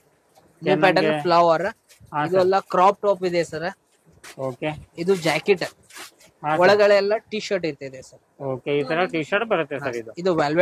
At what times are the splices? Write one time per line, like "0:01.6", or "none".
none

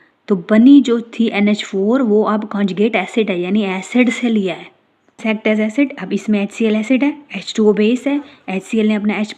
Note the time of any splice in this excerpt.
0:05.2

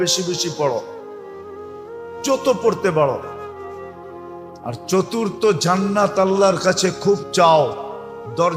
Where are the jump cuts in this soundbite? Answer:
none

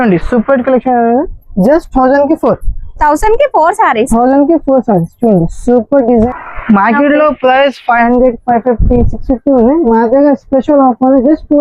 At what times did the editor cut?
0:06.3

